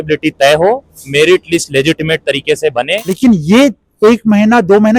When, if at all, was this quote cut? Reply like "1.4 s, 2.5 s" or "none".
3.0 s

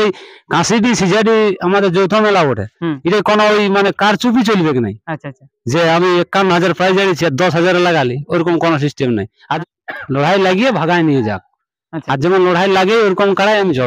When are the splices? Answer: 9.4 s

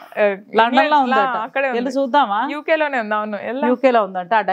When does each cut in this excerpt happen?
none

